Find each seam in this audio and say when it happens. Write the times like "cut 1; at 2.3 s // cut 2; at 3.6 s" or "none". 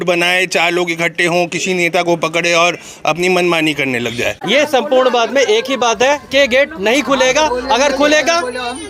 cut 1; at 4.4 s